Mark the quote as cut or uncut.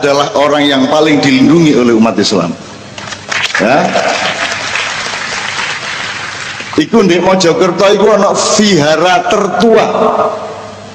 uncut